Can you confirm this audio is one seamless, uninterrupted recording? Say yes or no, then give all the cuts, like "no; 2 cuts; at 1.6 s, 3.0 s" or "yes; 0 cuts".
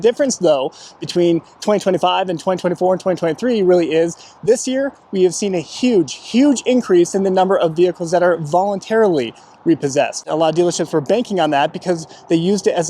no; 1 cut; at 10.2 s